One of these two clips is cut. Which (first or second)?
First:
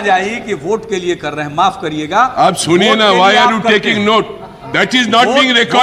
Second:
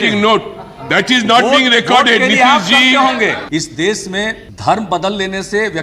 second